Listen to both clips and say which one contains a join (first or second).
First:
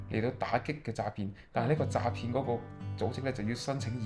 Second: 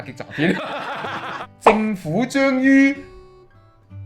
second